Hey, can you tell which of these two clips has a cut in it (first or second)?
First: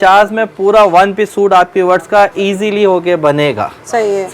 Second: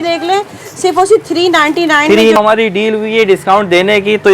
second